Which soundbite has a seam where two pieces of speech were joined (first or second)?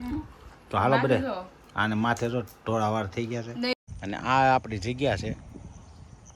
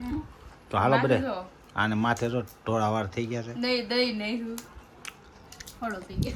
first